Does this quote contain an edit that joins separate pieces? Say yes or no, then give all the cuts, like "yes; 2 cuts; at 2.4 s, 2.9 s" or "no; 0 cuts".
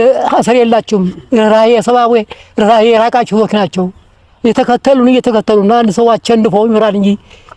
no; 0 cuts